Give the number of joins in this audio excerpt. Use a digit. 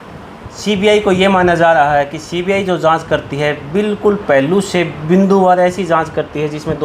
0